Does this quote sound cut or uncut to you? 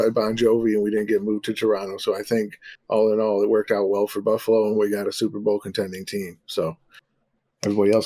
uncut